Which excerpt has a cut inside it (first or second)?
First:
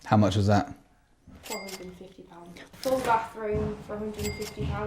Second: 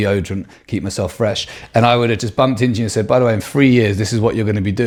first